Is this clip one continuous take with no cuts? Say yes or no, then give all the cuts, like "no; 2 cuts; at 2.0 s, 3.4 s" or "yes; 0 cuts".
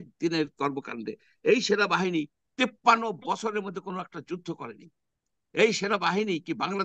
yes; 0 cuts